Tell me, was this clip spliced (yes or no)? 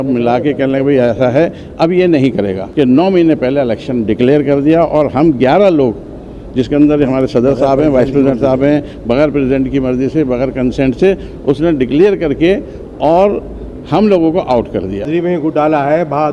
yes